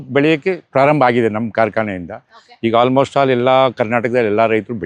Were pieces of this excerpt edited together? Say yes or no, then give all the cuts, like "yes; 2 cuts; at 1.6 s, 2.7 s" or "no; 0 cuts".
no; 0 cuts